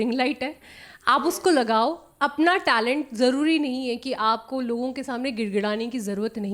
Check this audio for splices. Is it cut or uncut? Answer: uncut